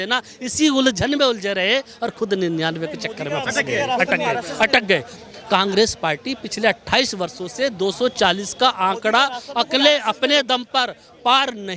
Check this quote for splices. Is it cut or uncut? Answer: uncut